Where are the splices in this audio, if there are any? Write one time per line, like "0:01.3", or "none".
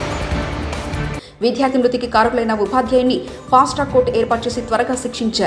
0:01.1

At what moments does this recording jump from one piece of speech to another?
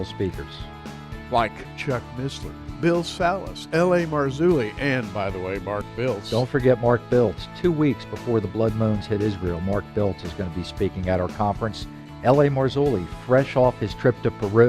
0:11.3

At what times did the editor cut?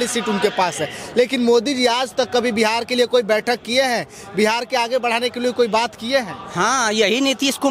none

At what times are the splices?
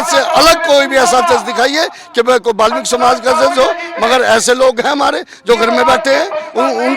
none

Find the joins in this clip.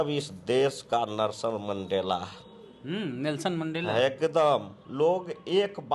0:04.8

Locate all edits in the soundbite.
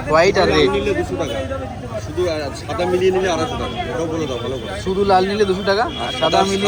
none

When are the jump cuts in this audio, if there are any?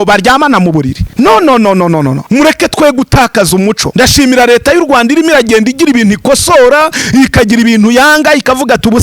0:01.0
0:02.2
0:03.8

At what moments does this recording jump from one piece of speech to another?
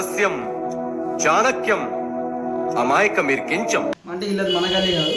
0:03.9

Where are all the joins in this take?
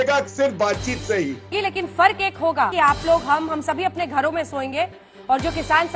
0:01.5
0:02.7

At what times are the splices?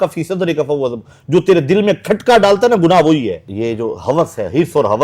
0:03.4

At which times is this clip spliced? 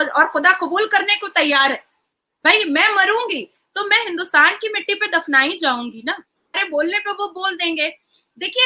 0:06.6

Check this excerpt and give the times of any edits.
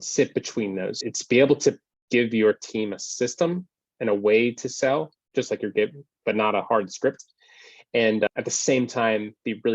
0:01.0
0:08.3

